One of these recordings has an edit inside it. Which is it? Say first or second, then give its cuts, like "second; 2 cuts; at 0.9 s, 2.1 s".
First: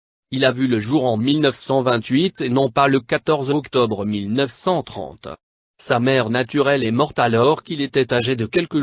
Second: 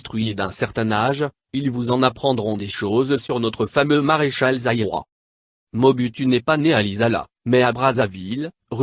second; 1 cut; at 7.1 s